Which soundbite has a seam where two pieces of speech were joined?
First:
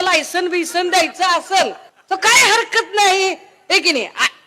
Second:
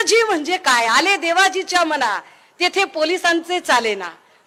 first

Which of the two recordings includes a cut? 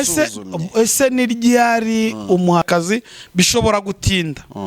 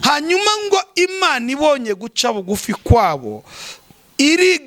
first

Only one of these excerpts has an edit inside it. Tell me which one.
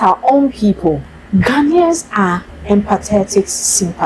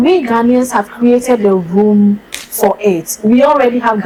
first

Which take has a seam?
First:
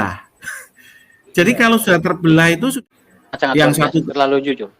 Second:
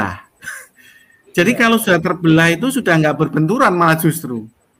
first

